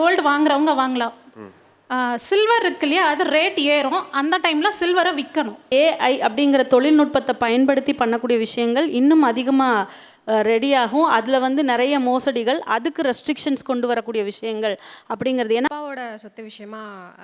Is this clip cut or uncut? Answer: cut